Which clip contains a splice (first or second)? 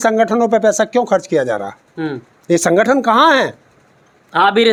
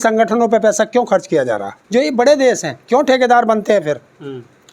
second